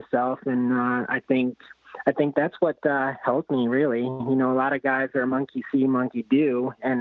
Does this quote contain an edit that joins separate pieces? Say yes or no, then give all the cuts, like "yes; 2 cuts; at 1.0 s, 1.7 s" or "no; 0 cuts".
no; 0 cuts